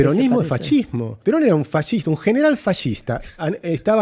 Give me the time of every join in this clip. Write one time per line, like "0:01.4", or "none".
0:01.1